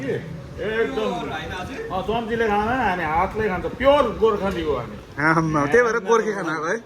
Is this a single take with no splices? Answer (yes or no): yes